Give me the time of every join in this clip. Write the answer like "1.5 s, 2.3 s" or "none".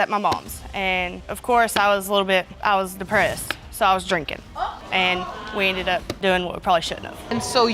none